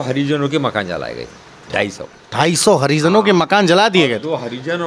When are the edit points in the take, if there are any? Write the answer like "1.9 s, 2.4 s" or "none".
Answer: none